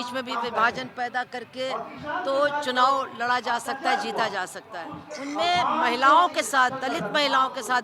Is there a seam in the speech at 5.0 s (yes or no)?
yes